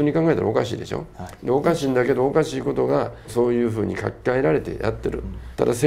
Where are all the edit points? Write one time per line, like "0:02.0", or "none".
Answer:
none